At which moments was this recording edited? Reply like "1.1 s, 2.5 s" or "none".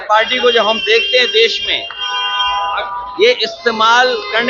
none